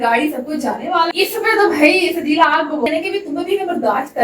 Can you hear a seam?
yes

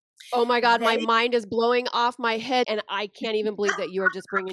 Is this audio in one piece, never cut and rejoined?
no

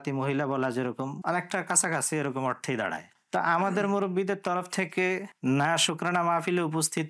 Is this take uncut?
no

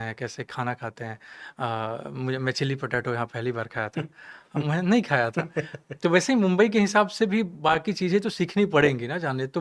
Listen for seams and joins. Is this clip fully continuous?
yes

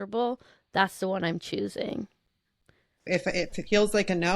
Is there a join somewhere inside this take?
yes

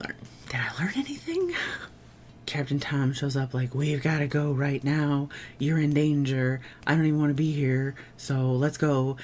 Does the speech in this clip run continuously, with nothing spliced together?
no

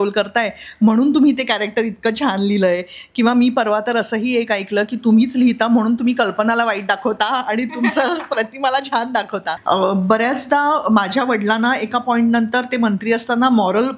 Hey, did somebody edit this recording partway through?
yes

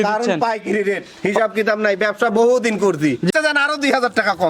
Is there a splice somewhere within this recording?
yes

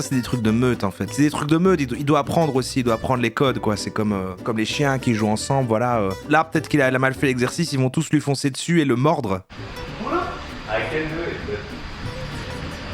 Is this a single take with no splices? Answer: no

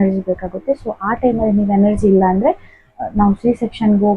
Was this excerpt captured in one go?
yes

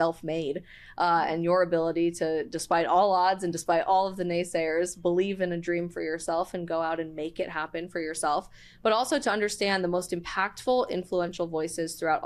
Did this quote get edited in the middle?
no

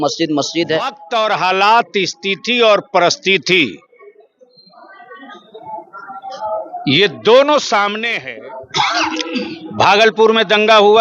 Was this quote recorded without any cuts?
no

